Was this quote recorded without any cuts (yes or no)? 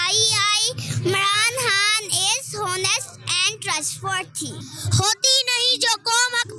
no